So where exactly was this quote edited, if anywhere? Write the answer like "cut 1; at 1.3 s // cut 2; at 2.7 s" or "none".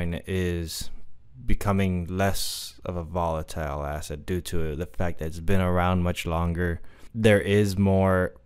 cut 1; at 7.0 s